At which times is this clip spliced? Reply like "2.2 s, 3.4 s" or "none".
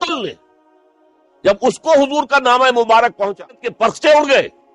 3.7 s